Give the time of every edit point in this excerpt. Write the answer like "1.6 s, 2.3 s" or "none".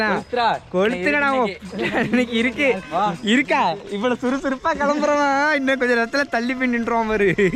none